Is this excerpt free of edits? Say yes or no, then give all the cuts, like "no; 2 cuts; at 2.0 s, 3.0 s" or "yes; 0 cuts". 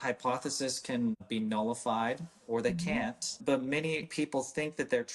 no; 3 cuts; at 1.2 s, 3.3 s, 4.1 s